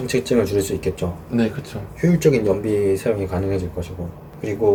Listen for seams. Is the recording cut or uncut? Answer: uncut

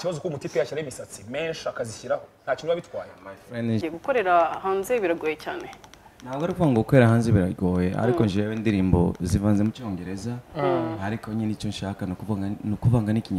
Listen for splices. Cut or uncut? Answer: cut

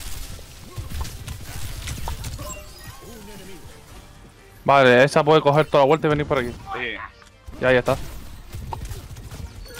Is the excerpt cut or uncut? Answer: uncut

